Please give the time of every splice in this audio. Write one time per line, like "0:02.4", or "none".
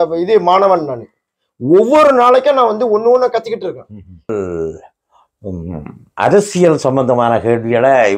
0:04.3